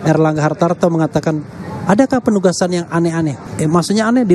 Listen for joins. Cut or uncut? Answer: cut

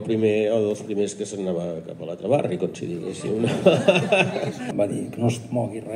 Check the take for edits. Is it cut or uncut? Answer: cut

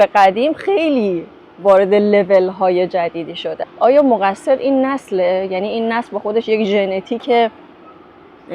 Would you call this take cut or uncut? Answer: cut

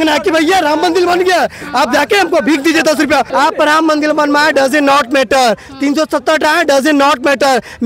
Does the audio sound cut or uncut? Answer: cut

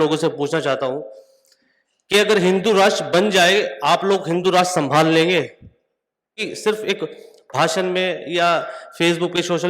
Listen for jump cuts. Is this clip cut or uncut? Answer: cut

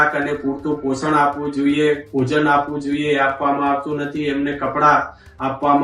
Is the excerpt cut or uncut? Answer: uncut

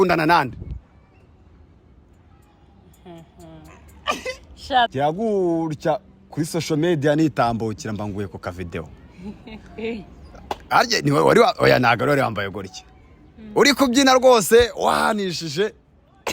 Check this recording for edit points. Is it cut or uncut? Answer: cut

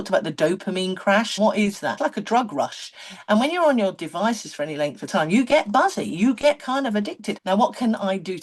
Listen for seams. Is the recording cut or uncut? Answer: cut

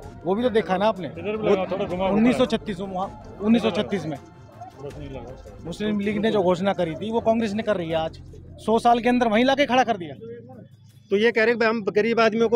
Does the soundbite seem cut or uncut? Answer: uncut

